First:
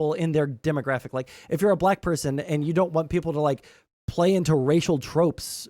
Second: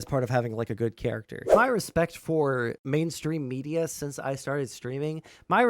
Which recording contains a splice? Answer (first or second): second